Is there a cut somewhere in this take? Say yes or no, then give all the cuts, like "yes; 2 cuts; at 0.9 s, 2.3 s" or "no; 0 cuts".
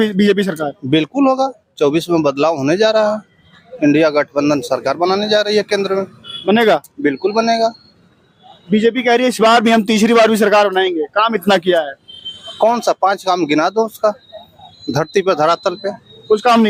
no; 0 cuts